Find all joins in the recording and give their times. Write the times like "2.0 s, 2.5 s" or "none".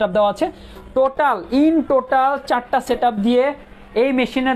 none